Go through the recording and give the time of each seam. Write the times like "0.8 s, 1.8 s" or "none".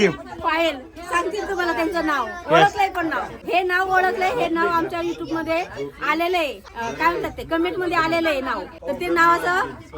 3.3 s, 6.7 s, 8.7 s